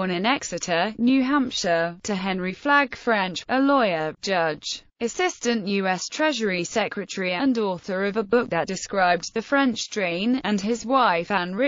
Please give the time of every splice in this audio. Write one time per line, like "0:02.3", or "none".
0:09.3